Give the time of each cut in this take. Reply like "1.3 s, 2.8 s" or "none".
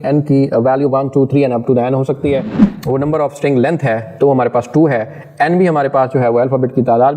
2.6 s